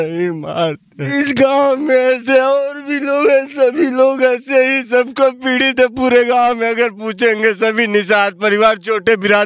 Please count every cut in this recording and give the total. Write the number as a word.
one